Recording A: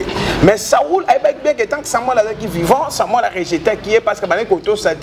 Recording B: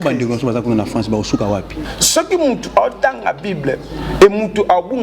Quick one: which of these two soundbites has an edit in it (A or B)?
B